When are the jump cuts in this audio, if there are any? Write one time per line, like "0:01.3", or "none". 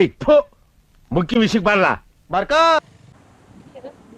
0:03.0